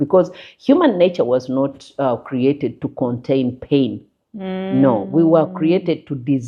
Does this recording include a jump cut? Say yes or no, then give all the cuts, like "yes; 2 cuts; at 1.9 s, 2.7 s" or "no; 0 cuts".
no; 0 cuts